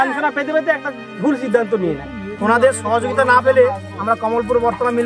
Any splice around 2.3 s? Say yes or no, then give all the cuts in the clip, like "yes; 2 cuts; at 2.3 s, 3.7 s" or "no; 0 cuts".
yes; 1 cut; at 2.3 s